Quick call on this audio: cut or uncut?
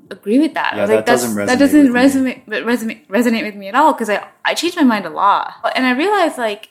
cut